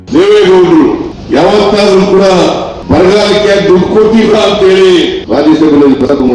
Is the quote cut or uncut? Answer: cut